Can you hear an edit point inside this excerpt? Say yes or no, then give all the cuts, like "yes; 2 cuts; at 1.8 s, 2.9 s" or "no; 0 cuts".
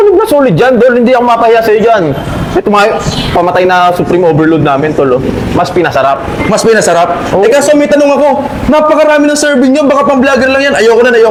no; 0 cuts